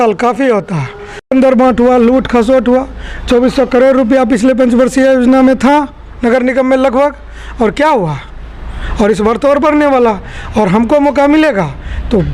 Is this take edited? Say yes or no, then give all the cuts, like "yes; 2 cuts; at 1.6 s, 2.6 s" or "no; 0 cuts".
yes; 1 cut; at 1.3 s